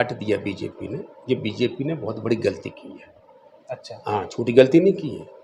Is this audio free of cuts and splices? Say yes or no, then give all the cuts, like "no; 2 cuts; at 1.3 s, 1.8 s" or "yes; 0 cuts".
yes; 0 cuts